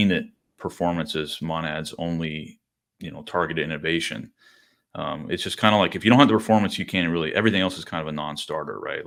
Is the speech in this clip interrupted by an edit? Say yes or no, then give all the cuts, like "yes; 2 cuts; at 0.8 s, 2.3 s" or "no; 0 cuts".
no; 0 cuts